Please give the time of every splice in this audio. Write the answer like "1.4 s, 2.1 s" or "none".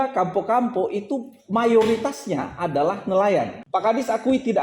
3.6 s